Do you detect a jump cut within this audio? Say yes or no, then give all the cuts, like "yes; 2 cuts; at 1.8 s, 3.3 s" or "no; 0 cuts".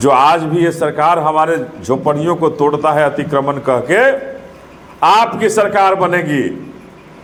no; 0 cuts